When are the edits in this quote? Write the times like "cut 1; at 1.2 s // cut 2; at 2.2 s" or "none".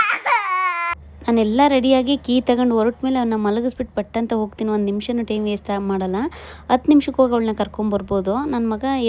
none